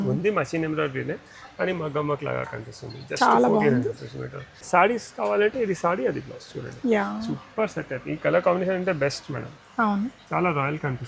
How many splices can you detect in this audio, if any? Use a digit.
1